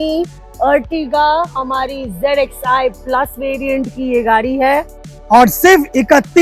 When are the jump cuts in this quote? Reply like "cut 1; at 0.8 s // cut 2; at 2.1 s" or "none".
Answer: none